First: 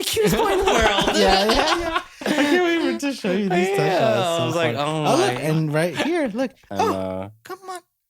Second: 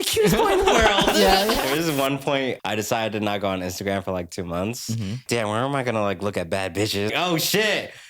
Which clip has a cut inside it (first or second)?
second